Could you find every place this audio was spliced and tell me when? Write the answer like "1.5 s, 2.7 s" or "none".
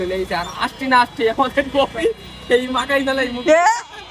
none